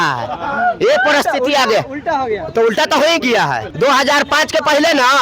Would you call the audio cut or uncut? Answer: cut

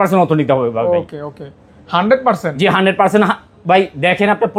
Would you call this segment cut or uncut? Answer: uncut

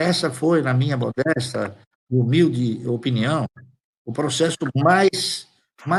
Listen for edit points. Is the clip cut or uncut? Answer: uncut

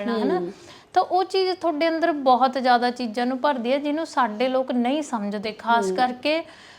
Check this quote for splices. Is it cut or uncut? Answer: uncut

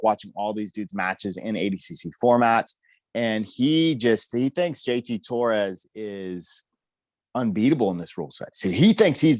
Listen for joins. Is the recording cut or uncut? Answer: uncut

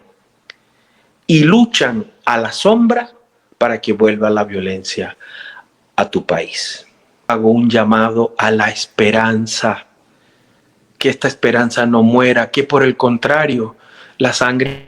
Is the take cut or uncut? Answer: cut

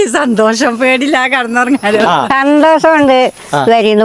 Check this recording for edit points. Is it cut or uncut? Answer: cut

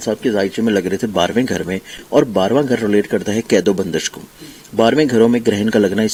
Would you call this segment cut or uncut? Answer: uncut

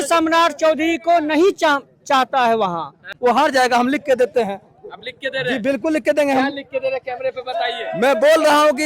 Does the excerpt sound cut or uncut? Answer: cut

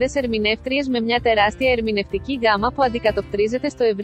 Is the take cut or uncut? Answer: uncut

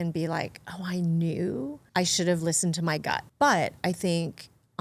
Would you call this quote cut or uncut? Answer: cut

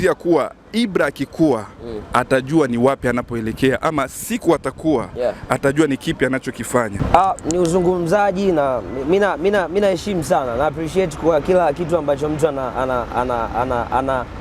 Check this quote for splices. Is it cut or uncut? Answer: cut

